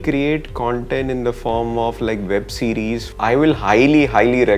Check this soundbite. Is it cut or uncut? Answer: cut